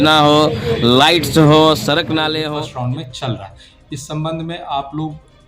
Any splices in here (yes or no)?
yes